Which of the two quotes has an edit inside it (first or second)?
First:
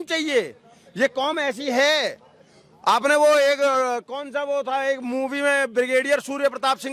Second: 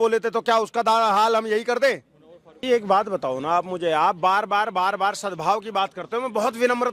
second